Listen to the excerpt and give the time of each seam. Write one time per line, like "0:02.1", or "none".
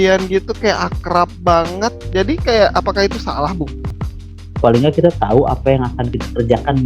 0:03.9